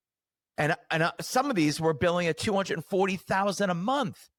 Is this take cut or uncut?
uncut